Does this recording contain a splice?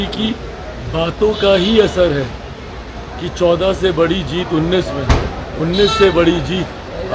no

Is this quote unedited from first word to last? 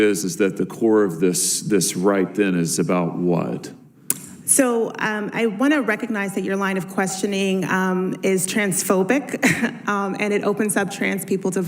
yes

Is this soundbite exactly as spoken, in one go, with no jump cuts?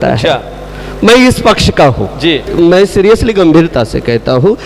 no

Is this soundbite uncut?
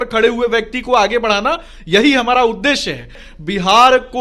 no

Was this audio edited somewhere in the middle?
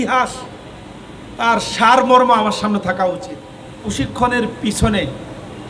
yes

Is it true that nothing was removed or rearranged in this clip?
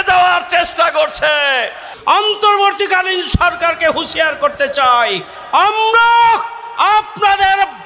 no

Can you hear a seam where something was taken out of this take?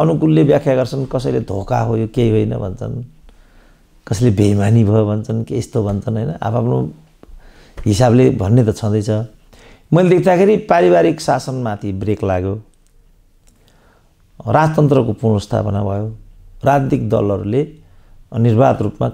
no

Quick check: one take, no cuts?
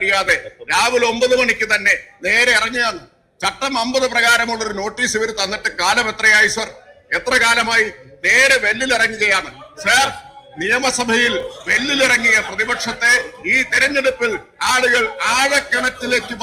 yes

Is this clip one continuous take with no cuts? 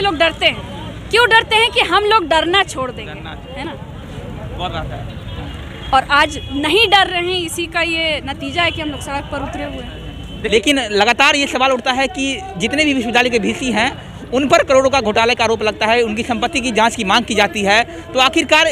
yes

